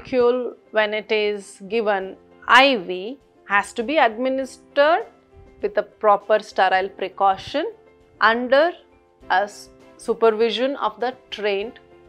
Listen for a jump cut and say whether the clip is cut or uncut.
uncut